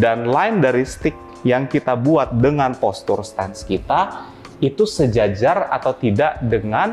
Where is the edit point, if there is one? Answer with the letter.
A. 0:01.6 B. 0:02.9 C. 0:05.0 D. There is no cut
D